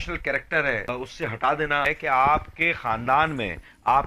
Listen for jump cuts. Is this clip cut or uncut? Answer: cut